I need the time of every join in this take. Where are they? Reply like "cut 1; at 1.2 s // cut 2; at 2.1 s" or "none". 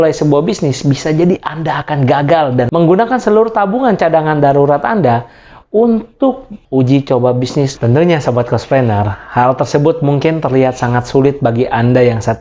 cut 1; at 2.7 s // cut 2; at 7.7 s